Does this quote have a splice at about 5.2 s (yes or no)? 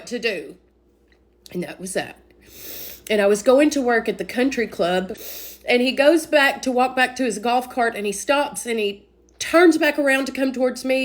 yes